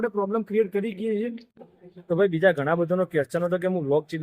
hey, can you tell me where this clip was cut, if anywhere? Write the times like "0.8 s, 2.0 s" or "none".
1.5 s